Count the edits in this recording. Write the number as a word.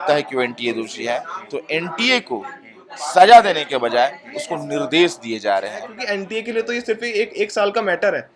one